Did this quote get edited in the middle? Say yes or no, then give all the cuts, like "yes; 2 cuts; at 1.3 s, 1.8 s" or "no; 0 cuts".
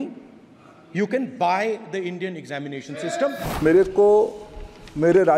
yes; 1 cut; at 3.4 s